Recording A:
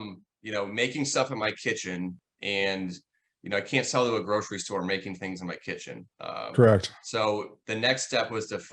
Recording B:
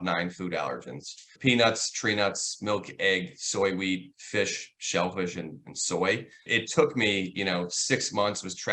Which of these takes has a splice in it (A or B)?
B